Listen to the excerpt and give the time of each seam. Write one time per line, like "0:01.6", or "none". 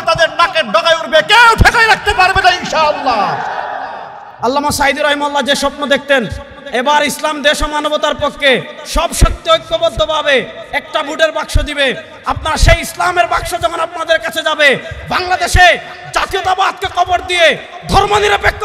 0:04.3